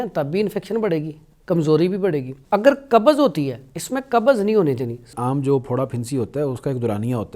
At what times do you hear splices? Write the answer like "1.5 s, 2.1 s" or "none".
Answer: 2.3 s, 5.1 s